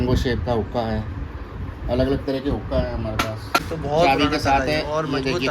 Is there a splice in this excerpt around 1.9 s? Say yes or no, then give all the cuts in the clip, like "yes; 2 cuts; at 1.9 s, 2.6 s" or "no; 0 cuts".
no; 1 cut; at 3.7 s